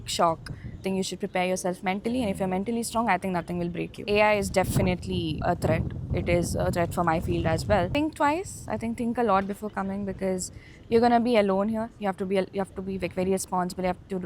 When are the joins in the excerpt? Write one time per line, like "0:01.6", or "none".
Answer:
0:00.8
0:04.1
0:05.4
0:07.9